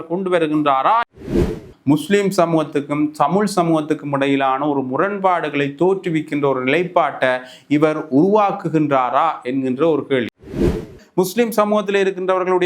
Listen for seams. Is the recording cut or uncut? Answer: cut